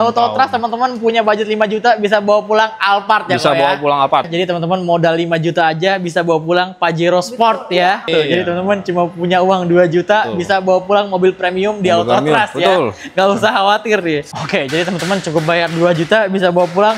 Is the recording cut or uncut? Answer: cut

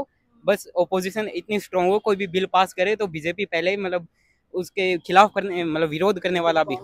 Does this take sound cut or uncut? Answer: uncut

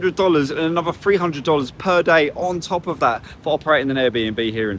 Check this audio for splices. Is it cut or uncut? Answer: uncut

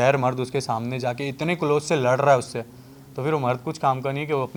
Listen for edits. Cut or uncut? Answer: uncut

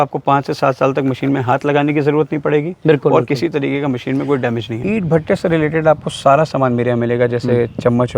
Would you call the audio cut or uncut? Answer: cut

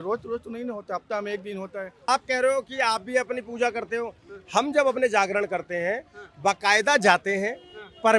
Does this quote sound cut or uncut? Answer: cut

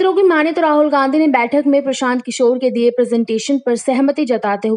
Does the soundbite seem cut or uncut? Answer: uncut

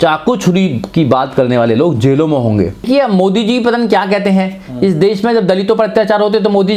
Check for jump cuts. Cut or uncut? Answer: cut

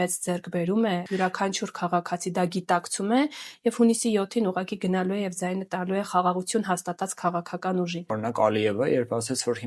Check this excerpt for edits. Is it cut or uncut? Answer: cut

